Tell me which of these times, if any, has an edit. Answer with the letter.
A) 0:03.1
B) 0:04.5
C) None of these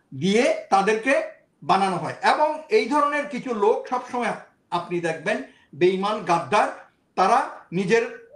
C